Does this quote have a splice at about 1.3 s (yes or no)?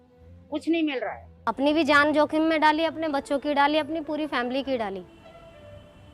yes